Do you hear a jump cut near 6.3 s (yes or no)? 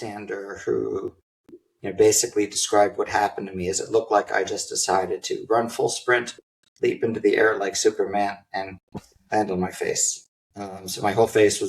no